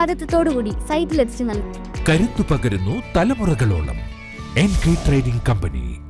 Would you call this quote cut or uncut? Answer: uncut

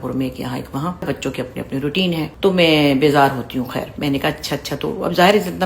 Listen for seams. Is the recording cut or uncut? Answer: cut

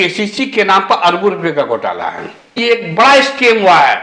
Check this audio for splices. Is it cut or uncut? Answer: cut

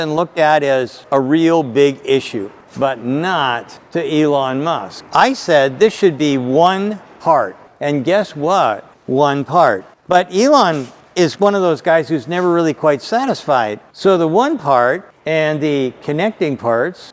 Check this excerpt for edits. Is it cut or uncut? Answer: cut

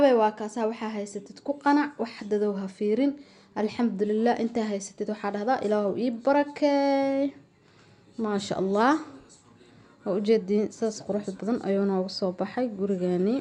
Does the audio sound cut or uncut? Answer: uncut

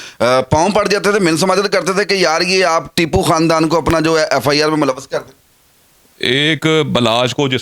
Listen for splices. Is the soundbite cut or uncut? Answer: uncut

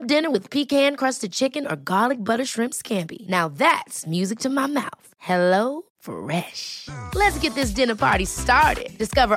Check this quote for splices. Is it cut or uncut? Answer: uncut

